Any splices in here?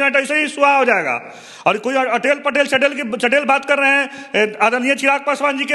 no; 0 cuts

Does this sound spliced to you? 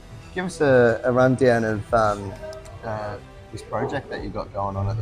no; 0 cuts

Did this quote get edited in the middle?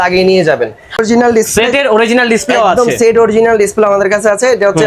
yes; 1 cut; at 1.0 s

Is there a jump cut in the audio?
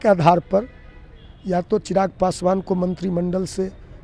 no; 0 cuts

